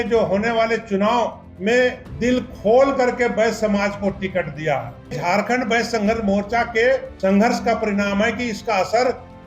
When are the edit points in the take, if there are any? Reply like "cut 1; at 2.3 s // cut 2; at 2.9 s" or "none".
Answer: cut 1; at 1.5 s // cut 2; at 2.1 s // cut 3; at 5.2 s // cut 4; at 7.1 s